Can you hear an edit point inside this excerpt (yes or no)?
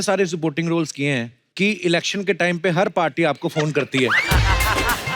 yes